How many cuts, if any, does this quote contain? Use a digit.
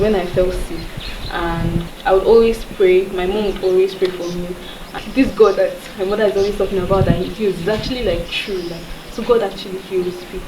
2